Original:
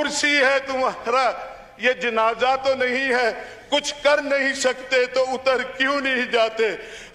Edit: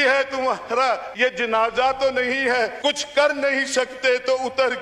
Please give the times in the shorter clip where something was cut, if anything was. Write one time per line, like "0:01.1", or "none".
0:01.1
0:02.7